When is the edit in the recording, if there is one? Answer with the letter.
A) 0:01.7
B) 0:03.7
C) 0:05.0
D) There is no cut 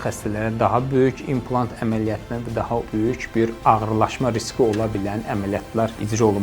D